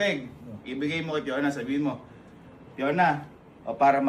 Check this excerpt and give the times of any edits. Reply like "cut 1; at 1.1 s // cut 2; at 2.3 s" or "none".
none